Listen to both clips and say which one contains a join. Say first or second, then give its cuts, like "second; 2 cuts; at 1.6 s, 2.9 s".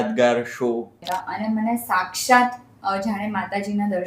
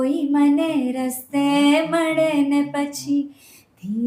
first; 1 cut; at 1.0 s